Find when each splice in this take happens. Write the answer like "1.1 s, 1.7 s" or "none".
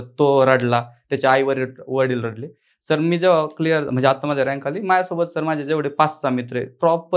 none

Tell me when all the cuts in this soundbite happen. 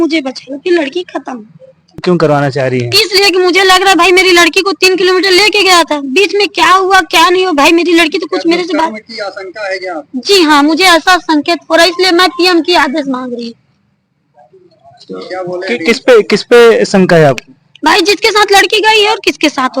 2.0 s

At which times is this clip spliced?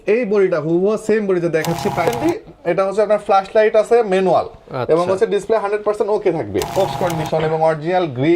2.1 s, 6.9 s

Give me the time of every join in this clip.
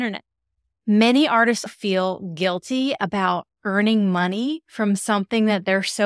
1.7 s

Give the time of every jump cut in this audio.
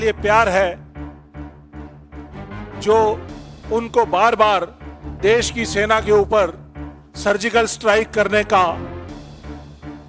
9.1 s

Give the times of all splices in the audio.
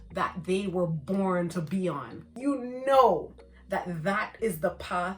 2.3 s

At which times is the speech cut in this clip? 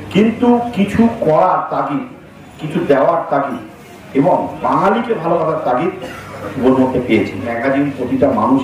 7.5 s

